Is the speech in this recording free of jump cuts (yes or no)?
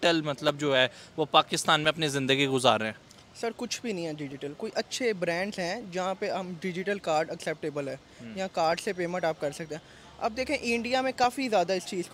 yes